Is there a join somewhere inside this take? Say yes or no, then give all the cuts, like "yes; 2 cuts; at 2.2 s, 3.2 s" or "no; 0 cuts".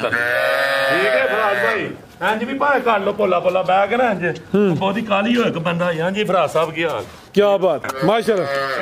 yes; 1 cut; at 7.9 s